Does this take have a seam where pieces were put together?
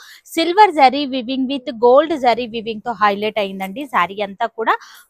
no; 0 cuts

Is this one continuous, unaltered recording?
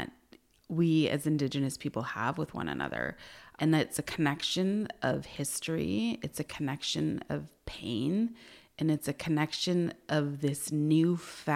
no; 1 cut; at 3.5 s

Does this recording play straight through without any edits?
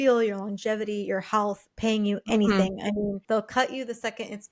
no; 1 cut; at 3.2 s

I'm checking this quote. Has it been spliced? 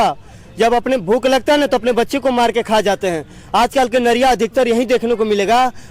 no; 0 cuts

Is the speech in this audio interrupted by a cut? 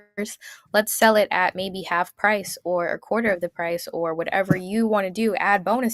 no; 0 cuts

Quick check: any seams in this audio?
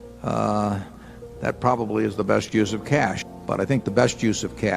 yes; 1 cut; at 3.2 s

